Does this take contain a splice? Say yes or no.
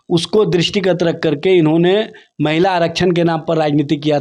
no